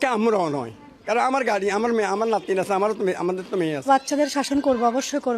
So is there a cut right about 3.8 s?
yes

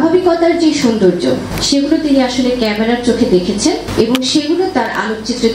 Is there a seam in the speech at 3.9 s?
yes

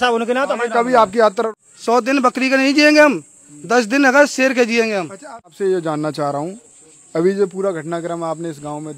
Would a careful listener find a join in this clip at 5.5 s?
yes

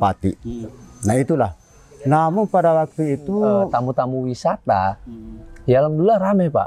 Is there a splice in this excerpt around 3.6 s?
yes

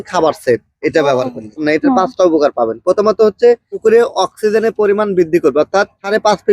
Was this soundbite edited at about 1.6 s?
yes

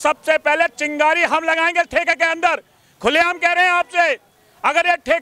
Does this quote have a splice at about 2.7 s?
no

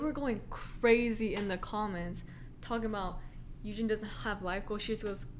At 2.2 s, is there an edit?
no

